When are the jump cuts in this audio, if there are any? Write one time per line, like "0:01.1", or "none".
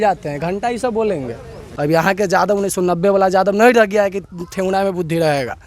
0:01.6